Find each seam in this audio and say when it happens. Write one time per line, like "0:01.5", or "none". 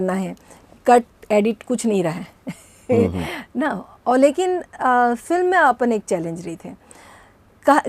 none